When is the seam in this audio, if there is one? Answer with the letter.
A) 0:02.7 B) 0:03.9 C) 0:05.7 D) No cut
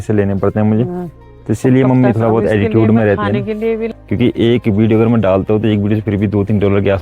B